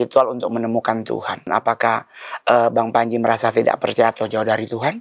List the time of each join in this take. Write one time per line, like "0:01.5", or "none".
0:01.5